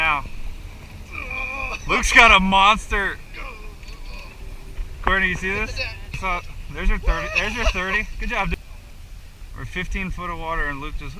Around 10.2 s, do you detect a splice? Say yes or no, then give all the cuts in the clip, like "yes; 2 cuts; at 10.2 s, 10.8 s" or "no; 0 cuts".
no; 2 cuts; at 6.1 s, 8.5 s